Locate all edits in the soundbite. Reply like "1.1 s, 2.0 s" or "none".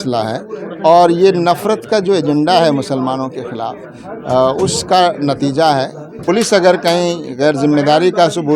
6.1 s